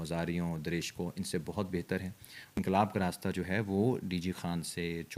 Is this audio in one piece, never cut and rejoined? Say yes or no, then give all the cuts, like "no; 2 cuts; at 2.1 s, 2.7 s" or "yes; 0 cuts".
no; 1 cut; at 2.3 s